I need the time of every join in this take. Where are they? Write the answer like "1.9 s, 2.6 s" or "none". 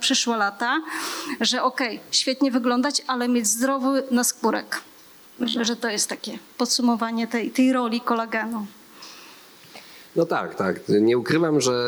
none